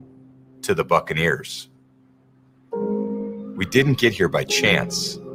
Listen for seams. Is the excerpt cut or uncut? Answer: uncut